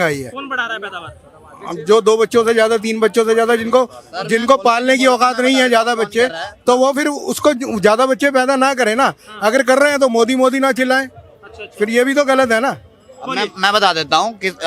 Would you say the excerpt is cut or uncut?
uncut